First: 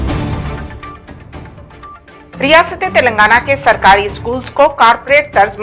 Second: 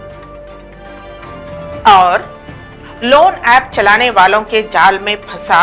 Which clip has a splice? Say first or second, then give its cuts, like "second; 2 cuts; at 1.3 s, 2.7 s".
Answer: first; 1 cut; at 2.1 s